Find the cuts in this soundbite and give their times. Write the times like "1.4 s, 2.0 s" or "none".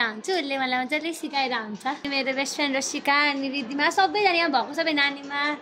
2.1 s